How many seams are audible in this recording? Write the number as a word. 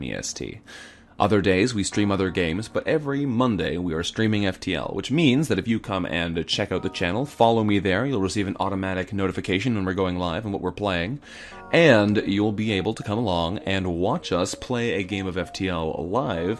one